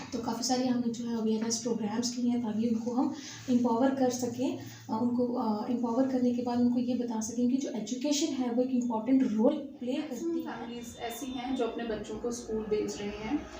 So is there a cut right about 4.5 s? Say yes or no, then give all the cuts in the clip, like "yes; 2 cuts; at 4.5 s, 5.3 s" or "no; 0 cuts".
no; 1 cut; at 10.4 s